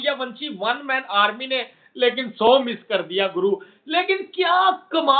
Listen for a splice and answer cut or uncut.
uncut